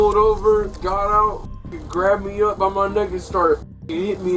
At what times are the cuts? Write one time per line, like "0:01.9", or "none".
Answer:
none